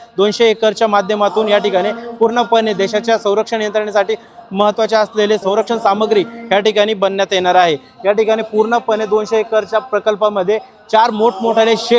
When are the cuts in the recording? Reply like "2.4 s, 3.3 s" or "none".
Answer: none

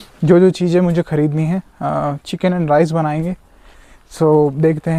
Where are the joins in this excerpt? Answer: none

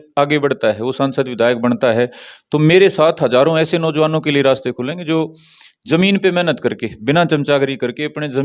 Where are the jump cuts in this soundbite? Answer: none

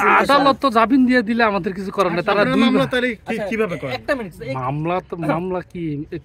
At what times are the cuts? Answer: none

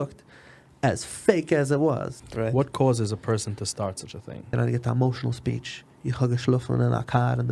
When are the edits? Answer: 2.2 s, 4.5 s

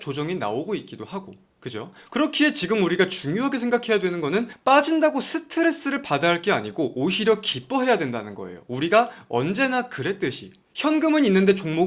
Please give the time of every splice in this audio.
2.0 s

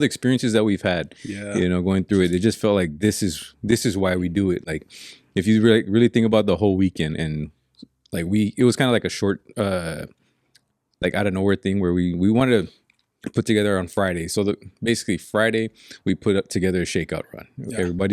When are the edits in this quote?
none

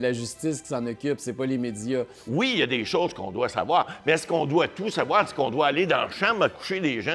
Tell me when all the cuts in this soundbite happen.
2.2 s

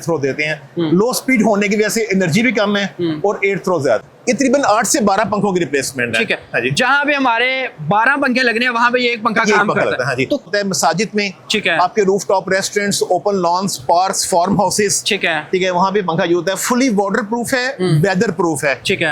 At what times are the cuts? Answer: 4.0 s, 10.4 s

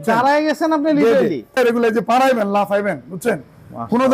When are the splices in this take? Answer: 1.6 s

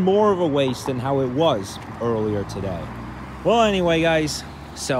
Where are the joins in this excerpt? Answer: none

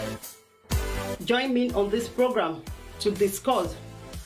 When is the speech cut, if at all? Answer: 1.1 s

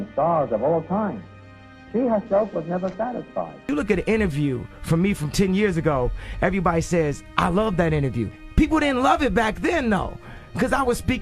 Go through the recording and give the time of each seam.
3.6 s

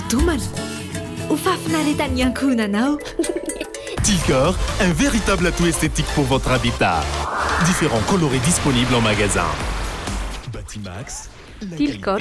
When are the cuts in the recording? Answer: 3.9 s

